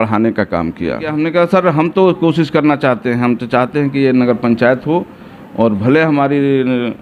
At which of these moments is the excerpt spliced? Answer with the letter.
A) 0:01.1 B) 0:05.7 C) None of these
A